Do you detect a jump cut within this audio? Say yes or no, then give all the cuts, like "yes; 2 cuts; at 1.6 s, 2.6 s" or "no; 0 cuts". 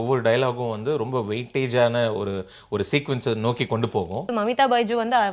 yes; 1 cut; at 4.3 s